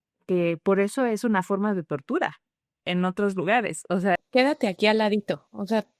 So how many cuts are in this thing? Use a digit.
1